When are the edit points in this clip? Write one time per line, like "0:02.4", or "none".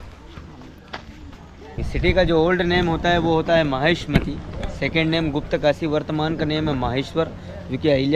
0:01.8